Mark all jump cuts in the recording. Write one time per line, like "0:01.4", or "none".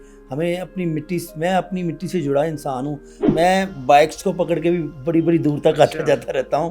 0:03.2